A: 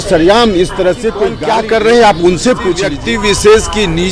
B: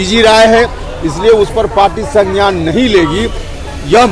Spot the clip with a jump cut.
A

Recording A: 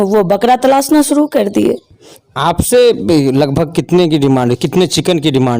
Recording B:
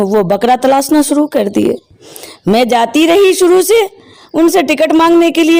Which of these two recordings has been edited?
A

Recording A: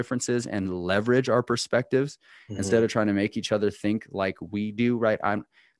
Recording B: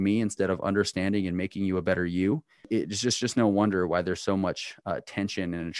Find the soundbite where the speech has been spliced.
B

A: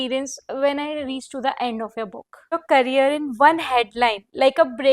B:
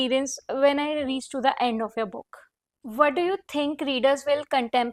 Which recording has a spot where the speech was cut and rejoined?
A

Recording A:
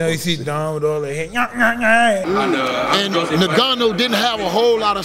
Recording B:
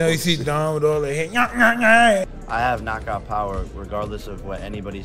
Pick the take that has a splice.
A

